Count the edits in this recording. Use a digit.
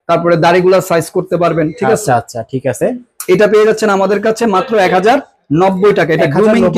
0